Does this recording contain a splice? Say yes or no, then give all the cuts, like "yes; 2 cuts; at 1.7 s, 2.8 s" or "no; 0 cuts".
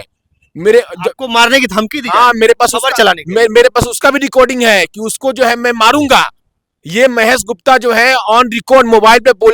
no; 0 cuts